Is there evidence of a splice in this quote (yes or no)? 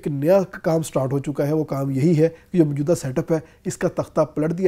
no